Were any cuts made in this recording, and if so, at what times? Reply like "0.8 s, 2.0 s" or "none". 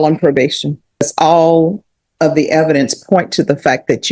1.0 s